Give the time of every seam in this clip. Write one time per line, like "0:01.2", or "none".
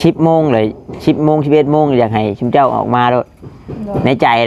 none